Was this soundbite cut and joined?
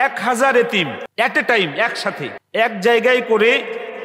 yes; 2 cuts; at 1.0 s, 2.3 s

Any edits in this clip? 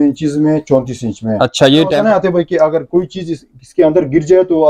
yes; 1 cut; at 1.9 s

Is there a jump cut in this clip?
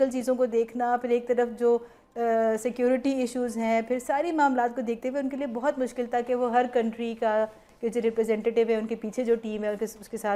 no; 0 cuts

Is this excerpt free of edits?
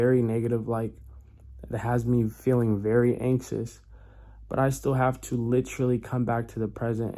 yes; 0 cuts

